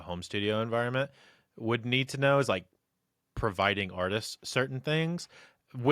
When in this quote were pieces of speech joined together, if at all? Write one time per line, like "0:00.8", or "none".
none